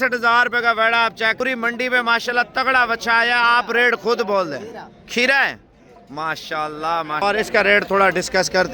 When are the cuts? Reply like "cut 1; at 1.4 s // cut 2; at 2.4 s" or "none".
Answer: cut 1; at 1.4 s // cut 2; at 7.2 s